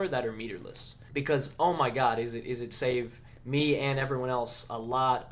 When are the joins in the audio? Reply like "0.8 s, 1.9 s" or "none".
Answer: 1.0 s